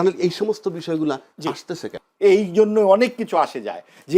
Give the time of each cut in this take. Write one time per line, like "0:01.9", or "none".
0:01.9